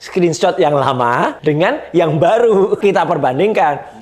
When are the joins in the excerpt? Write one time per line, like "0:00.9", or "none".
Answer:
0:01.4
0:02.8